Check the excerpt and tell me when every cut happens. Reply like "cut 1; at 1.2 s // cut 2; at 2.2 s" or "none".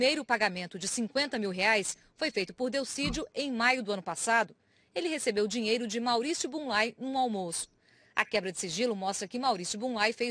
cut 1; at 5.5 s

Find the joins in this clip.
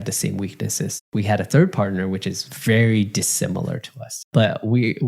cut 1; at 1.0 s // cut 2; at 4.3 s

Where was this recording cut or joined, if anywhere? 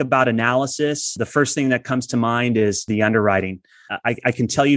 cut 1; at 1.2 s // cut 2; at 2.8 s // cut 3; at 3.8 s

